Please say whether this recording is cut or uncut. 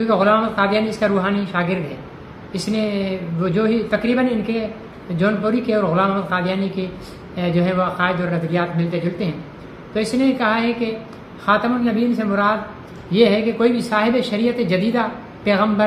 uncut